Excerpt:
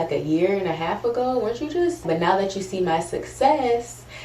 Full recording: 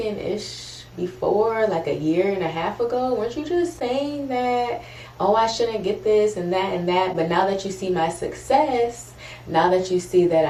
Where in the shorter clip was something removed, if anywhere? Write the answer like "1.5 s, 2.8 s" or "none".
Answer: 2.0 s